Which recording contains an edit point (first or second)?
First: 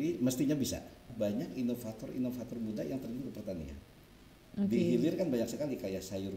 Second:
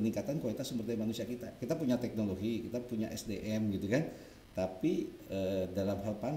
first